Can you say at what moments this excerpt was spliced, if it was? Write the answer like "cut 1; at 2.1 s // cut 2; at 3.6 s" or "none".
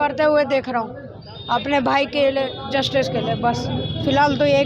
none